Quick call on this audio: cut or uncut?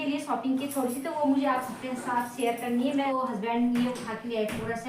cut